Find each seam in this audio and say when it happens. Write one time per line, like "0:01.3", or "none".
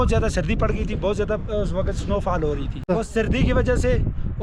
0:02.8